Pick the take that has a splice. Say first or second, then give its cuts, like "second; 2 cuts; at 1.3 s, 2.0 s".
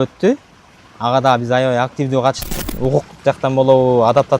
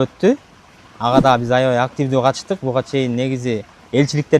first; 1 cut; at 2.4 s